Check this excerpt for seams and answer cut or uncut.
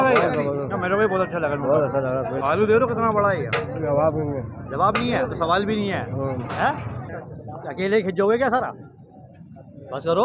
cut